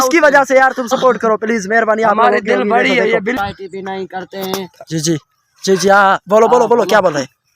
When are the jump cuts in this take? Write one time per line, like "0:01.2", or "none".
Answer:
0:03.4